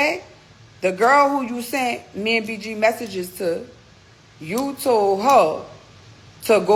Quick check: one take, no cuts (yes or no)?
yes